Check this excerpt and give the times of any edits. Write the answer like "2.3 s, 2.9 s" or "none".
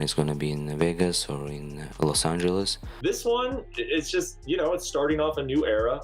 2.9 s